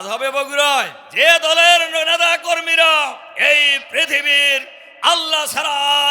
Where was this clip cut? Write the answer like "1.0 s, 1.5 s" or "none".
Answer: 1.0 s, 3.3 s